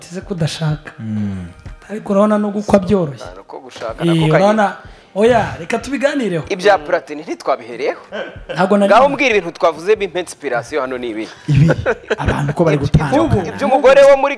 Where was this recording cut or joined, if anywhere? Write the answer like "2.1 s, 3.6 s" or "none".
none